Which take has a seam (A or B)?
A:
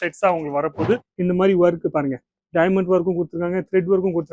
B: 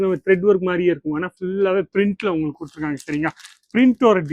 A